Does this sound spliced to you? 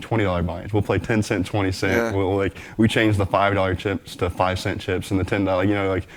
no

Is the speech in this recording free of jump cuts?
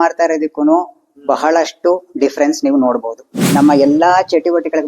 no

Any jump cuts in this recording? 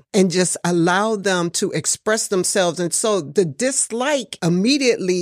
yes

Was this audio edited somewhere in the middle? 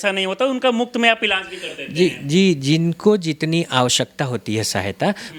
no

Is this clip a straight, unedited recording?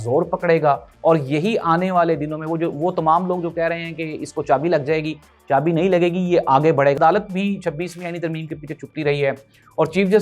no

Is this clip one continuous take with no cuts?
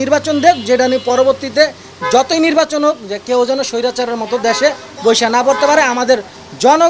yes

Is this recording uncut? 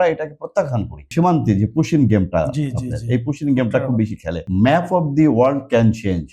no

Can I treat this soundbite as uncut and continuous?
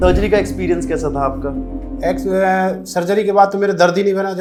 yes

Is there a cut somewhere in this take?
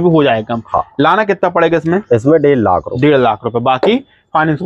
no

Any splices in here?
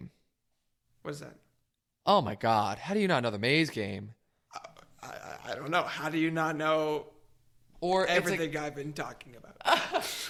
no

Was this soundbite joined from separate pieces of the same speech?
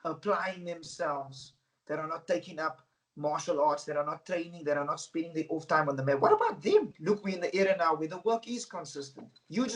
yes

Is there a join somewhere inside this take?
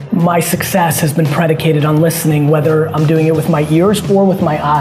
no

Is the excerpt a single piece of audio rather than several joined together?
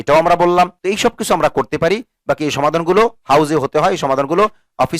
yes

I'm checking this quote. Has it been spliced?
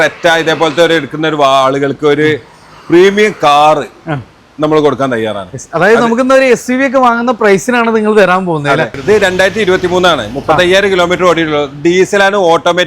yes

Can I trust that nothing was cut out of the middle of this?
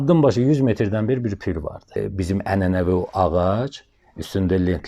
no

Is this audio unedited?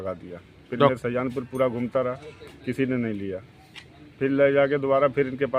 yes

